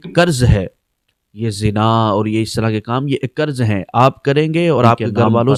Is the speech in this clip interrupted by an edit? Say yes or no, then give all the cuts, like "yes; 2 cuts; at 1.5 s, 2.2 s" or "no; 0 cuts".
no; 0 cuts